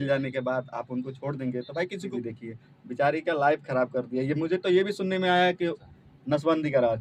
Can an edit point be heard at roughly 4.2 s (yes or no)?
no